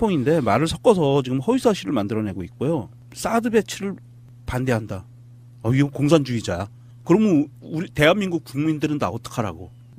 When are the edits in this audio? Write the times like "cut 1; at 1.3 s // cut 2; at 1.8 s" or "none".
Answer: cut 1; at 5.0 s